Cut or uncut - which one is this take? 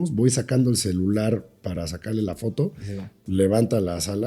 uncut